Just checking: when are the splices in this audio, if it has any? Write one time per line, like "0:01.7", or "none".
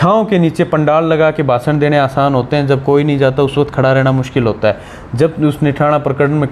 none